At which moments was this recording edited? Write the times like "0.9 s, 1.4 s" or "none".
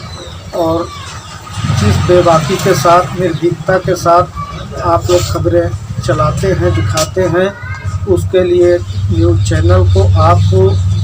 none